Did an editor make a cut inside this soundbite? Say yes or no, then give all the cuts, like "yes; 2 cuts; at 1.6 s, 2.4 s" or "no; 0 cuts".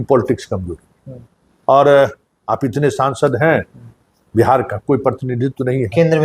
no; 0 cuts